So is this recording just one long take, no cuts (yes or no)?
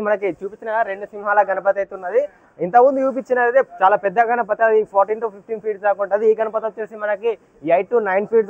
yes